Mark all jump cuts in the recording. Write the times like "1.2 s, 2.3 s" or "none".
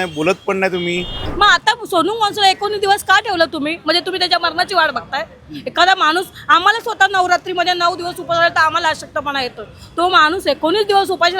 1.2 s